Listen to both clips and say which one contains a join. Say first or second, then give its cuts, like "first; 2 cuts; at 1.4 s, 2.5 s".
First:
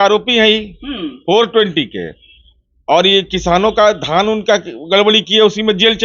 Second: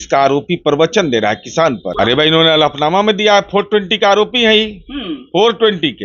second; 1 cut; at 1.9 s